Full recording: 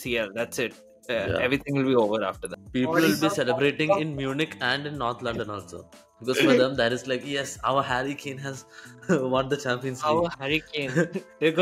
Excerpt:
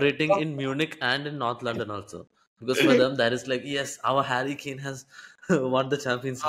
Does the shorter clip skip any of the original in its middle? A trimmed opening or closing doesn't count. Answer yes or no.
no